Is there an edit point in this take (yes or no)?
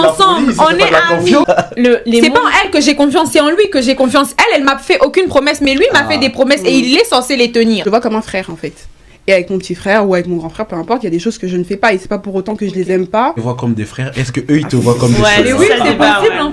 yes